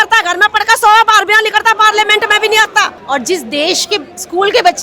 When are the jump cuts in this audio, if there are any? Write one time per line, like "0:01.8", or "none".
0:03.0